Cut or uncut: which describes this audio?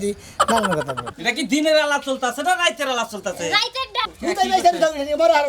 cut